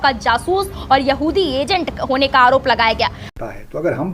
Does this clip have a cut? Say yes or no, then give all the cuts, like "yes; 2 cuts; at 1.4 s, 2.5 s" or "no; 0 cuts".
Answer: yes; 1 cut; at 3.2 s